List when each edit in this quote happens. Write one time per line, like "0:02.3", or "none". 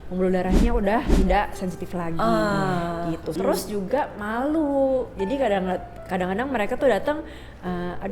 0:03.3